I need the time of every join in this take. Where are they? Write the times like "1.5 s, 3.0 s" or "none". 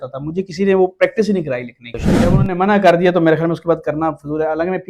2.3 s